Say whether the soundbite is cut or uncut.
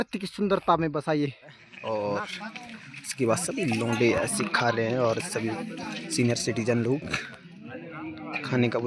cut